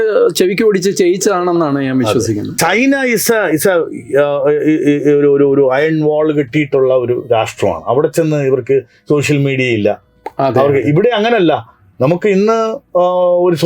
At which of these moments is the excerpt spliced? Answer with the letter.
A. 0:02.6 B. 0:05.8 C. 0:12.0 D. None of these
A